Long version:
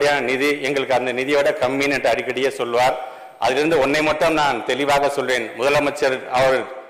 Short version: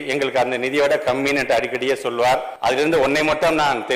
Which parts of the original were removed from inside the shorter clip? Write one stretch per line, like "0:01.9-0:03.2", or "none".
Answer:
0:03.1-0:03.3